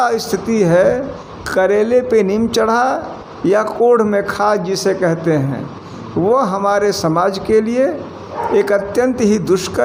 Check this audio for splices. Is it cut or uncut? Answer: uncut